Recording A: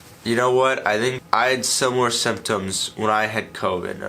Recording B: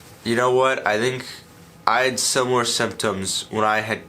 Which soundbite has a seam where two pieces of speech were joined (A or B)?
A